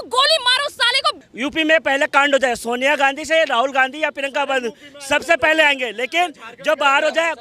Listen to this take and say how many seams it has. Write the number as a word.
one